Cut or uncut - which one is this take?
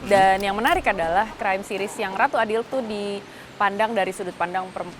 cut